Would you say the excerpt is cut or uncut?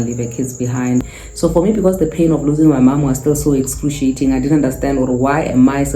cut